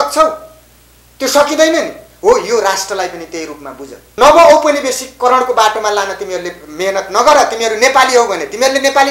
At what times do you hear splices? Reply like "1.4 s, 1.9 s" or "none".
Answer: 4.0 s